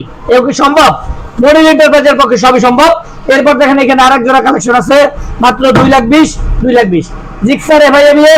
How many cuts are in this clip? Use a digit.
0